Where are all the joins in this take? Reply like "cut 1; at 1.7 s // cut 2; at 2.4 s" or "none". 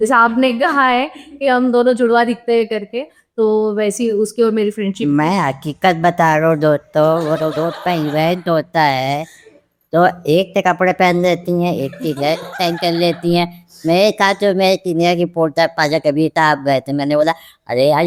none